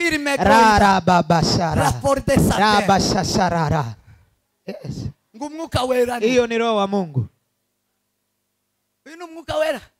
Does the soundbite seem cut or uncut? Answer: uncut